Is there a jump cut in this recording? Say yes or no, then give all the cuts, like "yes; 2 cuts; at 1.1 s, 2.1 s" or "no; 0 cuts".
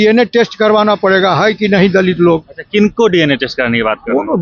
no; 0 cuts